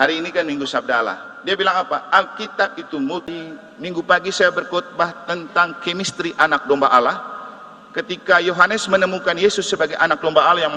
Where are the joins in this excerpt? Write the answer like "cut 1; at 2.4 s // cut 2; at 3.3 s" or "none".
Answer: cut 1; at 3.3 s